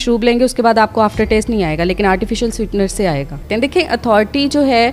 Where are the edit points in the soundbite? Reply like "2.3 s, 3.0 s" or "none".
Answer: 3.4 s